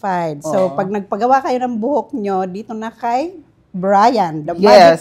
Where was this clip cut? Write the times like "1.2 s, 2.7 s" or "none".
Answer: none